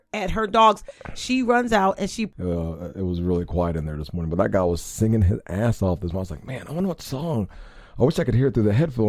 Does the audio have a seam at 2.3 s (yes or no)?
yes